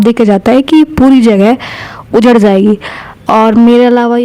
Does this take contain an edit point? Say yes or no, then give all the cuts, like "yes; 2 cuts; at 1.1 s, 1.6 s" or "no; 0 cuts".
no; 0 cuts